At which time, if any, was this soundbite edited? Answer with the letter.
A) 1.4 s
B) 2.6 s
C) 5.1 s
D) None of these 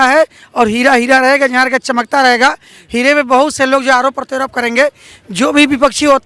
D